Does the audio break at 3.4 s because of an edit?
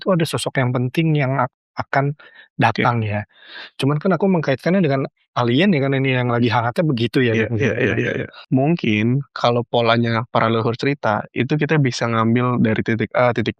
no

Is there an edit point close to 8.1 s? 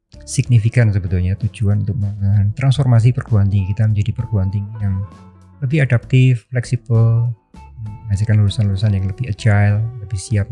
no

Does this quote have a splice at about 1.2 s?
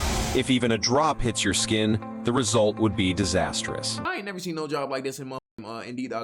yes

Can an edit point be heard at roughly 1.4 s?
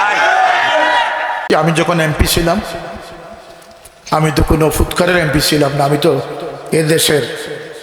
yes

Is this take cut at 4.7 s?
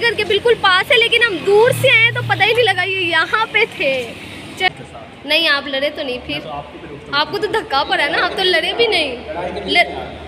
yes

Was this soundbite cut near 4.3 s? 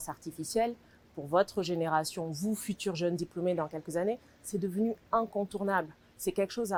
no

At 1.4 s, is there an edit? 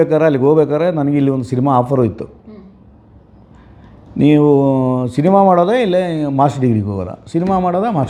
no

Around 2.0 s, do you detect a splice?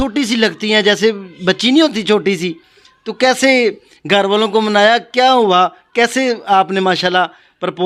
no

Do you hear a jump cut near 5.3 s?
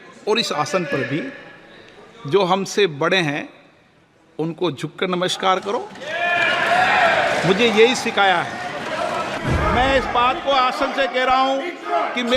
no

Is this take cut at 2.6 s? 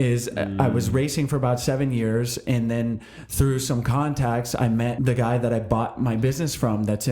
no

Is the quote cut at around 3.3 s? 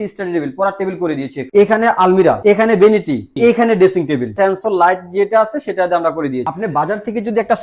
yes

